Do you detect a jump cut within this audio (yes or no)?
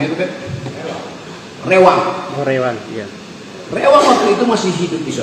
no